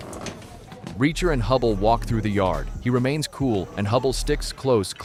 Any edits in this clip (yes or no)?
no